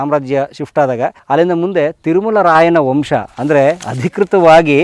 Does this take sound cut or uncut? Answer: cut